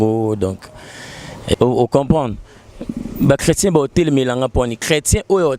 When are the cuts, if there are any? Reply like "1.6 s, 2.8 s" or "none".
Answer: 1.6 s